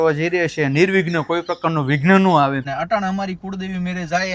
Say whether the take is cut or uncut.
cut